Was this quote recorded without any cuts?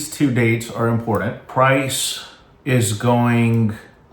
no; 1 cut; at 1.5 s

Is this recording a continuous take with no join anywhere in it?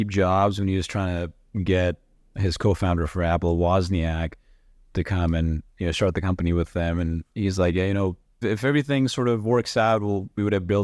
yes; 0 cuts

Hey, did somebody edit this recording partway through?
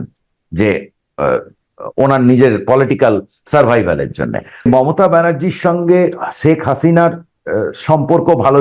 yes; 1 cut; at 4.7 s

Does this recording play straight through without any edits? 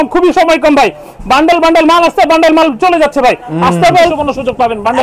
no; 1 cut; at 4.1 s

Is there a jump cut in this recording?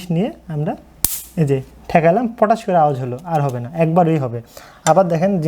no; 0 cuts

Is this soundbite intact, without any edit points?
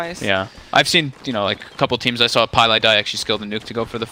yes; 0 cuts

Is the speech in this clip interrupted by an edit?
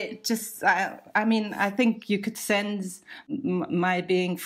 yes; 1 cut; at 3.2 s

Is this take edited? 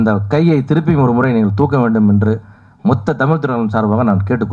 no; 0 cuts

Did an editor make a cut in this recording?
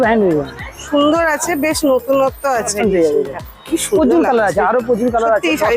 yes; 1 cut; at 2.7 s

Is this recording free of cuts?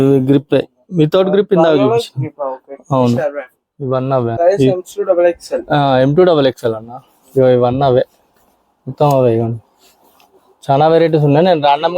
yes; 0 cuts

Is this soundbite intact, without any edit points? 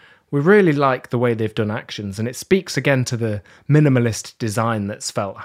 yes; 0 cuts

